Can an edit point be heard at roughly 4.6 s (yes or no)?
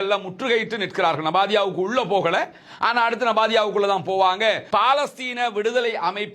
yes